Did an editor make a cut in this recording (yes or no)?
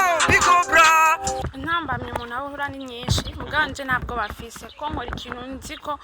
yes